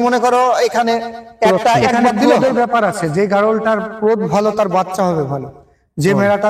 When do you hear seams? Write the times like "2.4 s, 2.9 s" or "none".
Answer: 2.2 s